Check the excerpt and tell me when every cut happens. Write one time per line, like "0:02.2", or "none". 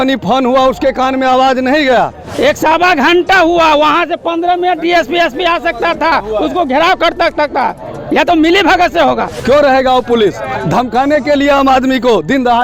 0:02.3
0:09.3